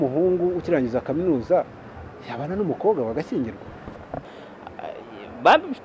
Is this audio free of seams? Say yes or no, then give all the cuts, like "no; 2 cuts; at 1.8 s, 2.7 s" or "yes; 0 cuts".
no; 1 cut; at 4.2 s